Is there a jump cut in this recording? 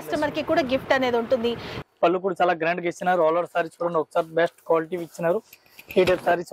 yes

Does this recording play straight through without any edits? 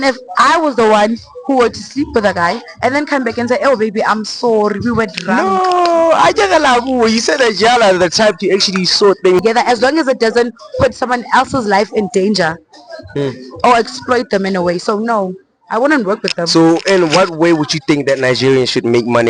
no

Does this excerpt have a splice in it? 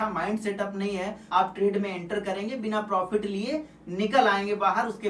yes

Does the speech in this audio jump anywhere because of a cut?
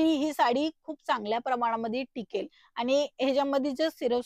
no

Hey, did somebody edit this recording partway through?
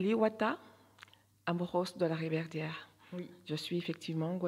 no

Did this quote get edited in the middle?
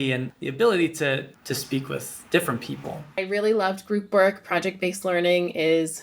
yes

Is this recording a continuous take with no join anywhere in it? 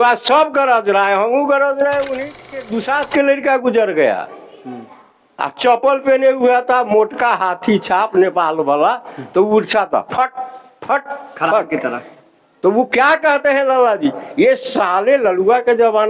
no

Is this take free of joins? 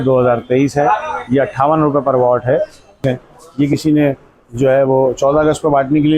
no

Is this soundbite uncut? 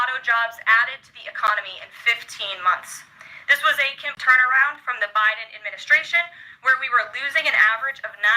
no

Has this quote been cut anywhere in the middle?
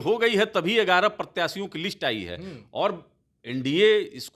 no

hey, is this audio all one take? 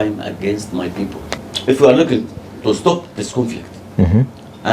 no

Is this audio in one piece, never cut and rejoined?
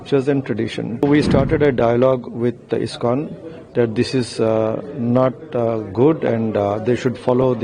no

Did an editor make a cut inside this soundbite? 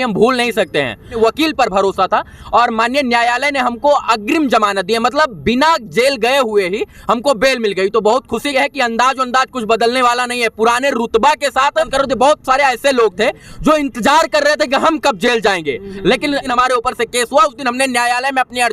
yes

